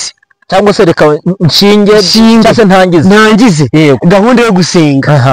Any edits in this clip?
no; 0 cuts

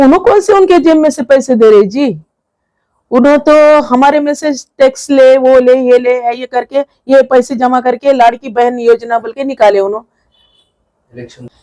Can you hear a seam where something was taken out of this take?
no; 0 cuts

